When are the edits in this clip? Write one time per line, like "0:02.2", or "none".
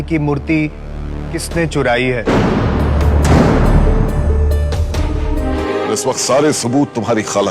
0:05.4